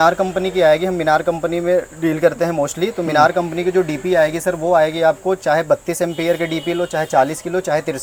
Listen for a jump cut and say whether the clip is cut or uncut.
uncut